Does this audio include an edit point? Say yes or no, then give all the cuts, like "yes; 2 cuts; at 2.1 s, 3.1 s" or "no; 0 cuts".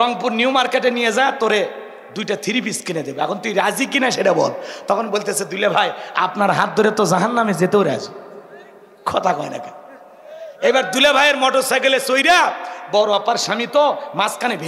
no; 0 cuts